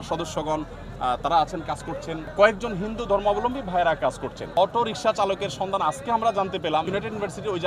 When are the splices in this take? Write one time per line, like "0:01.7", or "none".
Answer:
0:02.3
0:04.5
0:06.9